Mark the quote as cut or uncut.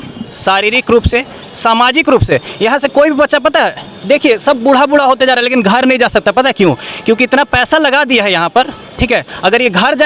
uncut